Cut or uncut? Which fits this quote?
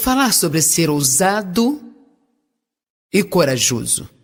uncut